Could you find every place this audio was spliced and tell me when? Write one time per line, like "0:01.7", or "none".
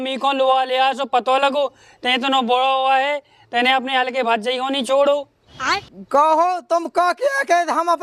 none